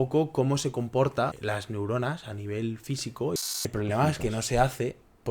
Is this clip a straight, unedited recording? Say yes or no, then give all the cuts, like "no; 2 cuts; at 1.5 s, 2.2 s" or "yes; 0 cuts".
no; 2 cuts; at 1.4 s, 3.6 s